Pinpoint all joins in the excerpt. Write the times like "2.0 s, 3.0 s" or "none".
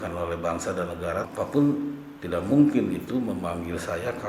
1.3 s